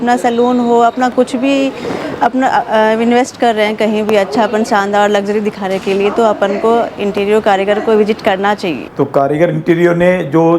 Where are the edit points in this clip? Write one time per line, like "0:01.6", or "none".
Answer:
0:08.8

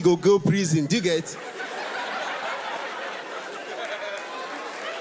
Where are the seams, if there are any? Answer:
none

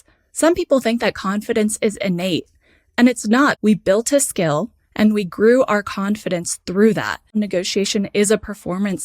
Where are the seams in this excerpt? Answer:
0:03.6
0:07.3

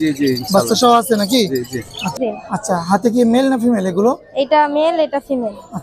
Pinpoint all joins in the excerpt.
0:02.2

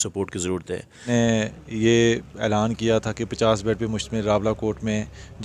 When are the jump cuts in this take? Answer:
0:01.1

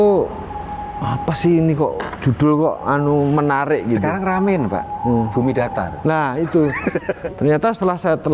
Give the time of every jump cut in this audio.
0:07.2

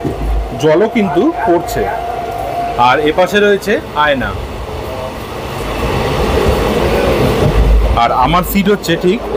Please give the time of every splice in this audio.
none

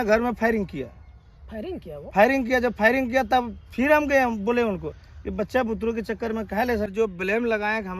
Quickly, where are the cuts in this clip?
0:06.9

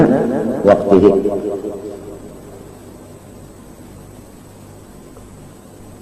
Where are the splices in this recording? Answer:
none

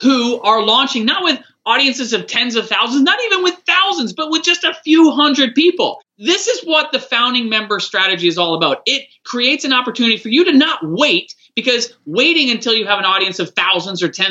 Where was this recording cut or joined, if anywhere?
0:06.0
0:09.2

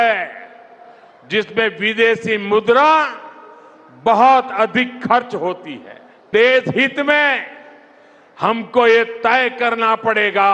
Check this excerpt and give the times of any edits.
0:06.2

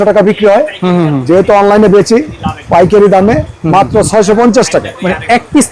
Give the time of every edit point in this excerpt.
none

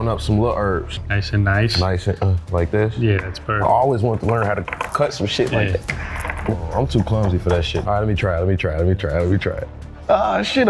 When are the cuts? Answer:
0:00.9
0:06.5
0:07.8

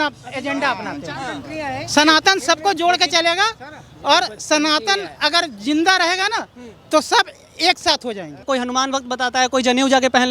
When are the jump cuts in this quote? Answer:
0:08.4

